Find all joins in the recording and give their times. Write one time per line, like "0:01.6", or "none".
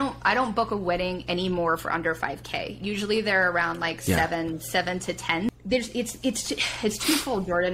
0:05.5